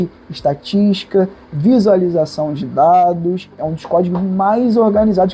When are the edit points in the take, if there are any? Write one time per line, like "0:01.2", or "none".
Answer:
0:03.6